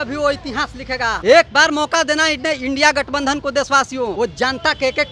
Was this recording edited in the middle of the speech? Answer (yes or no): yes